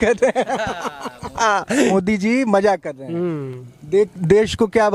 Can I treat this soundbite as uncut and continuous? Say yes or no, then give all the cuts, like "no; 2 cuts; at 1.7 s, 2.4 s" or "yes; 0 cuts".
yes; 0 cuts